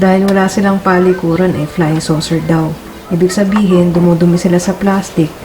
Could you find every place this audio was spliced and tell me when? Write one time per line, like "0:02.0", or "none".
0:02.9

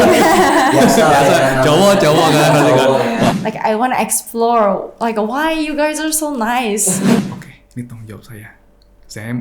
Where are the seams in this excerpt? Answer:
0:03.3
0:07.2

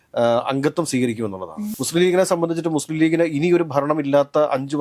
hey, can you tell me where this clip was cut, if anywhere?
0:01.7

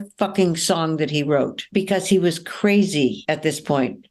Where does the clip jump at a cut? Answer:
0:01.6
0:03.2

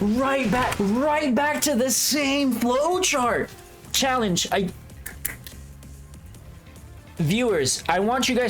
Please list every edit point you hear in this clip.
0:03.8

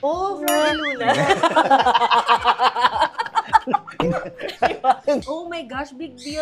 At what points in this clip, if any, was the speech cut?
0:05.2

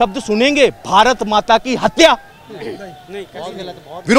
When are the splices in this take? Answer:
none

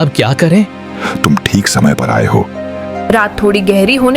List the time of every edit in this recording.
0:01.1

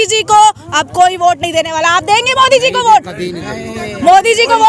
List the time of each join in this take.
none

